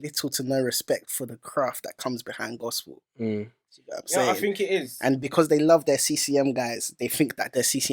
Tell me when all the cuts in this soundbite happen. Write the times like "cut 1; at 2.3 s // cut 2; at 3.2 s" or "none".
none